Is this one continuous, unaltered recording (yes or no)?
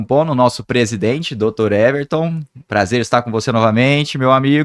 yes